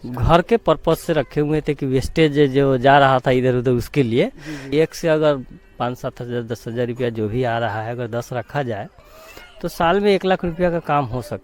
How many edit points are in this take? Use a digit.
1